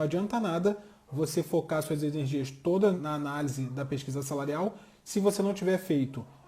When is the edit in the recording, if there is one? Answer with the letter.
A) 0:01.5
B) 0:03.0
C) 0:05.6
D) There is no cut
B